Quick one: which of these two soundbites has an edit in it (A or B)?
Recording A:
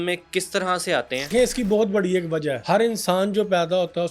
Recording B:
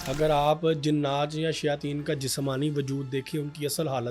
A